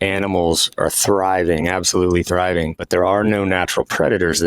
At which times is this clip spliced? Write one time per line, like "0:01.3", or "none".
0:02.8